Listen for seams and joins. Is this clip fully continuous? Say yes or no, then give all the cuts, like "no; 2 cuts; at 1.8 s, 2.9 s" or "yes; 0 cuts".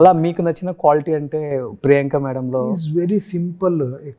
yes; 0 cuts